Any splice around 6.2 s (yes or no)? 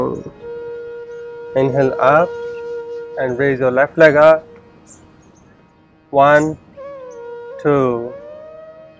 no